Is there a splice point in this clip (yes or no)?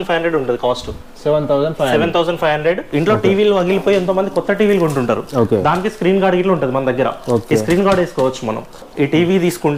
yes